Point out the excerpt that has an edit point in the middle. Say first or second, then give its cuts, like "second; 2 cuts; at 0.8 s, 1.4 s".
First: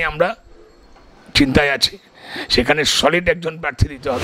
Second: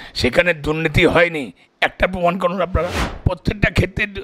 second; 1 cut; at 3.1 s